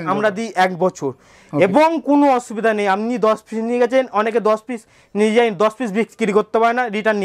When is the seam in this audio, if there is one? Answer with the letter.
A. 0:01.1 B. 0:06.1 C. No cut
C